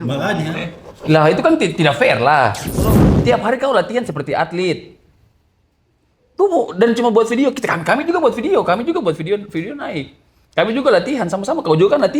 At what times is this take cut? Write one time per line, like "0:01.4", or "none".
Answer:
0:02.8